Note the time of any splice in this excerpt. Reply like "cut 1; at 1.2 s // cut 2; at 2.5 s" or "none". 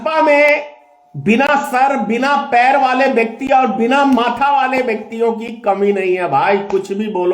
none